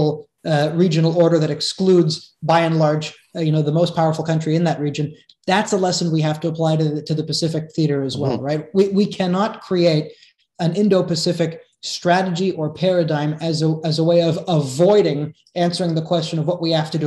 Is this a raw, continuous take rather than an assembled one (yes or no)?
yes